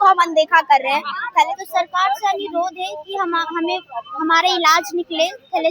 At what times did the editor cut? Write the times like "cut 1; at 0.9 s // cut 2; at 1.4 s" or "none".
cut 1; at 1.5 s